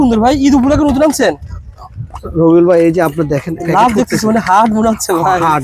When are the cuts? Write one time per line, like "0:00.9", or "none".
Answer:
none